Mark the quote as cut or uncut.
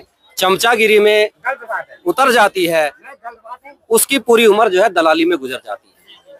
uncut